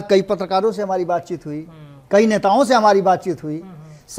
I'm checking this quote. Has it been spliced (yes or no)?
no